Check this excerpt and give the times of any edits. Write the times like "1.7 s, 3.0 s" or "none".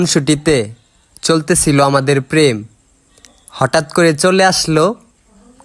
none